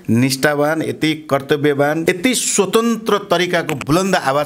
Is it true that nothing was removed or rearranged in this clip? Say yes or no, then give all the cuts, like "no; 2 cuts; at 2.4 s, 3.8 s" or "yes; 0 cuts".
no; 1 cut; at 2.0 s